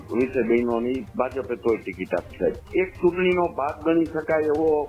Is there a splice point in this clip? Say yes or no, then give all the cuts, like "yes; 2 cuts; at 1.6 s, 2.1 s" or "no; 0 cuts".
yes; 1 cut; at 2.6 s